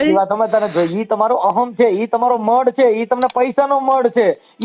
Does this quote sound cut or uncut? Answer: uncut